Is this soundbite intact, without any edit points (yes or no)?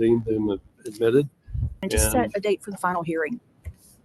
no